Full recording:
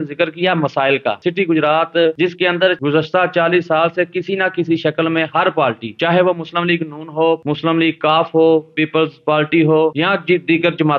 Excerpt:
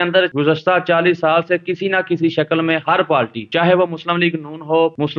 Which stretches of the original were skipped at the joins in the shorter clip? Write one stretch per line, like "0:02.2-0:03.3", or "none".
none